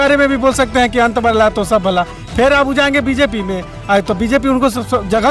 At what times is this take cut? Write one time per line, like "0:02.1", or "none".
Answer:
none